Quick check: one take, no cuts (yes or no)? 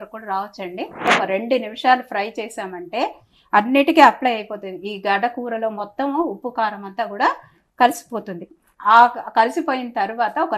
no